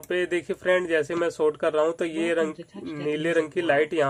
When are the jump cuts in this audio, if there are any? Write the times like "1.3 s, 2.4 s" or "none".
none